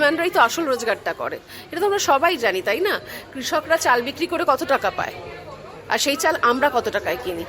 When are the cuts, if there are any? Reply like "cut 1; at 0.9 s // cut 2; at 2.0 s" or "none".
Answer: none